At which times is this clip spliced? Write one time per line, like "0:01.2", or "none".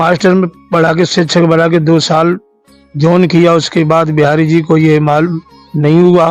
none